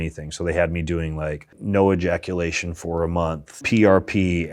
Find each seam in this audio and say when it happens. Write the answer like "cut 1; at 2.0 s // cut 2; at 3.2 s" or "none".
cut 1; at 1.5 s // cut 2; at 3.6 s